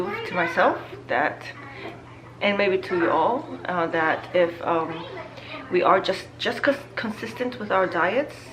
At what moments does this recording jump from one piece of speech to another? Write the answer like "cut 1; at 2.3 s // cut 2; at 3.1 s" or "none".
none